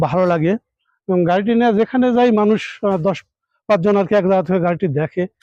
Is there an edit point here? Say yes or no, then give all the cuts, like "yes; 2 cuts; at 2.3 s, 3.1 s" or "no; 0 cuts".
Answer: no; 0 cuts